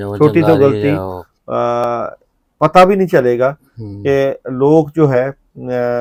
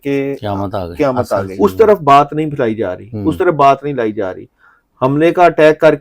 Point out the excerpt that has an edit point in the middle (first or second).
second